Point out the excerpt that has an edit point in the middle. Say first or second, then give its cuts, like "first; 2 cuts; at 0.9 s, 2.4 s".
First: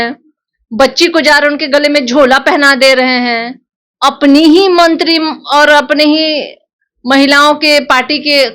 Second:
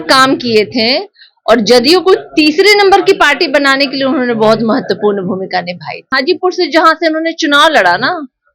second; 1 cut; at 6.0 s